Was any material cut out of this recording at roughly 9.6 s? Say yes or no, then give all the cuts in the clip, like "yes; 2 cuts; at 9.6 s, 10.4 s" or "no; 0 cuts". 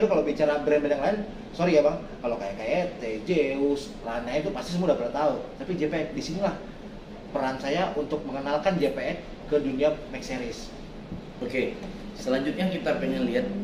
no; 0 cuts